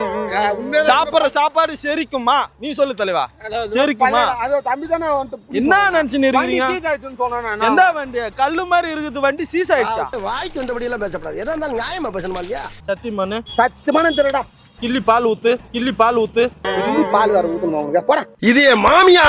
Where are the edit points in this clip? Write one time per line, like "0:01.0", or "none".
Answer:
0:12.7